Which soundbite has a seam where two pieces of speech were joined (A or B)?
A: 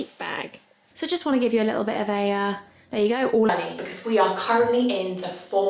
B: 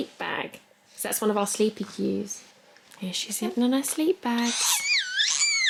A